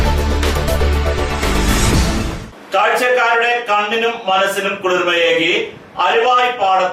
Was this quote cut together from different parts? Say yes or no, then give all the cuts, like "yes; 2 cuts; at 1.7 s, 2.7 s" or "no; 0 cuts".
no; 0 cuts